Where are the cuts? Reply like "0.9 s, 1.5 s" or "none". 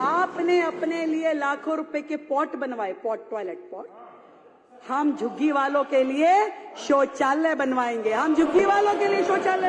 none

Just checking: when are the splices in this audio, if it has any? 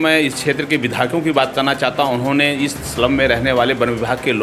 none

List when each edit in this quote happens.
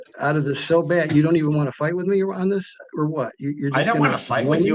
none

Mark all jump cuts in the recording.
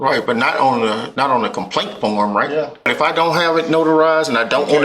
2.9 s

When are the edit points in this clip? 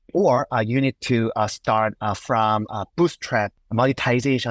3.6 s

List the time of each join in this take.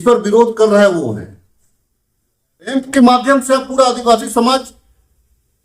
2.7 s

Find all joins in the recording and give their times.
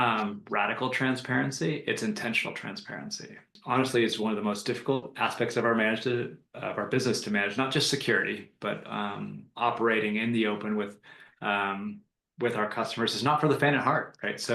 3.6 s

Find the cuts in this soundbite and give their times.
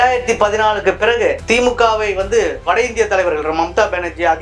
1.4 s, 2.6 s

